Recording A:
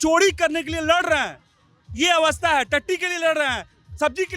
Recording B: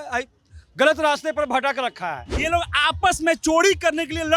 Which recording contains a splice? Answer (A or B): B